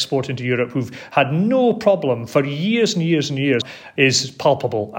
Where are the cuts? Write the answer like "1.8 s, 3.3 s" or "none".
3.7 s